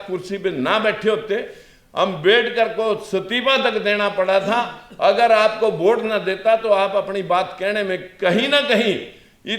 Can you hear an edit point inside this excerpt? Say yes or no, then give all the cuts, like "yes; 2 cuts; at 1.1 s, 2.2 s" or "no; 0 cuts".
no; 0 cuts